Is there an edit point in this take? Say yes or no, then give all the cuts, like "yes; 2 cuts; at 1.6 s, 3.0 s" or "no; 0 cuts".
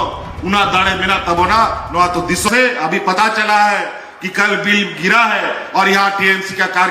yes; 1 cut; at 2.5 s